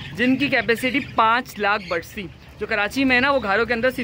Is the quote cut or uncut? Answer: uncut